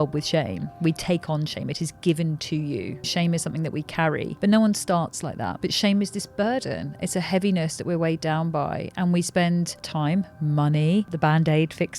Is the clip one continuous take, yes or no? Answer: no